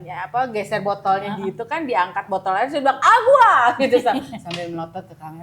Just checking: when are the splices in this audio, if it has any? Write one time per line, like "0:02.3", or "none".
none